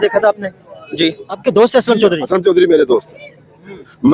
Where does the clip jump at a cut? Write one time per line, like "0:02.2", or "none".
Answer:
0:01.3